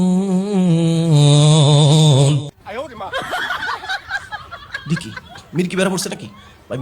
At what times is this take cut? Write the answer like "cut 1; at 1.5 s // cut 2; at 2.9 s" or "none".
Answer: cut 1; at 2.5 s